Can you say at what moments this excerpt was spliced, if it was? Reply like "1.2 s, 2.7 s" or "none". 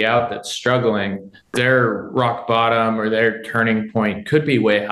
1.5 s